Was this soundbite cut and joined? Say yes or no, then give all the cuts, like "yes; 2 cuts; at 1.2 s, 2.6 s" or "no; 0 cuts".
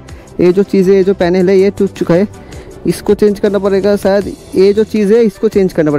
no; 0 cuts